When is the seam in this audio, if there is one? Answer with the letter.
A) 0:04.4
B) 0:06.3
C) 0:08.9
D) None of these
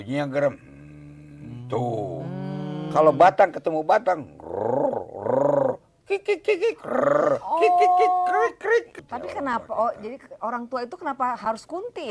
C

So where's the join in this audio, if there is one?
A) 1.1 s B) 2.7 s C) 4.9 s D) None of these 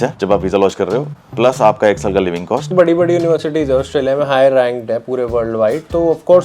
B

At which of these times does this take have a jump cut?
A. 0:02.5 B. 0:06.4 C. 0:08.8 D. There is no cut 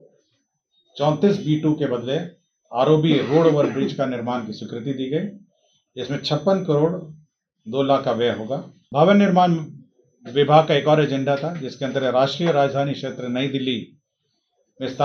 C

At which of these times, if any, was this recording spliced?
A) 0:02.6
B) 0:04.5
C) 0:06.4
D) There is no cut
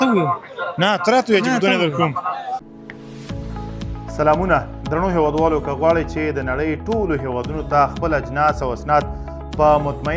A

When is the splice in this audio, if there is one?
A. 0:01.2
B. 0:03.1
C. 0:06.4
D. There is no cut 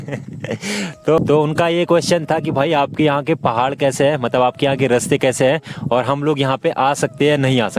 A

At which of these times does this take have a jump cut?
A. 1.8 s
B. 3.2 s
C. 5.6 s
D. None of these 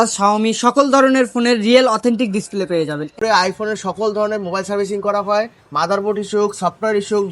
B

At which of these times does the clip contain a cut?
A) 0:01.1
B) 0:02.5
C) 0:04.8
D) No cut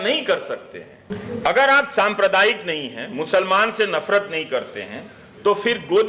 A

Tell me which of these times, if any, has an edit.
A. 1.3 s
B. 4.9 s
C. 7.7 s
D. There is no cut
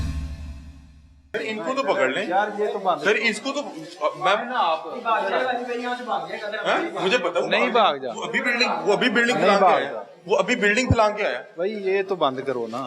A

